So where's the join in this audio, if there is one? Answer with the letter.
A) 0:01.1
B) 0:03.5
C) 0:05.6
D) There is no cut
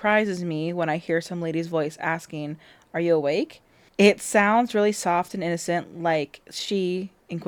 D